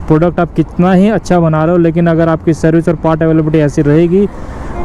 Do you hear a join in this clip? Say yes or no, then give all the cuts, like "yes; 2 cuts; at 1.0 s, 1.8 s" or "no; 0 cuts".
no; 0 cuts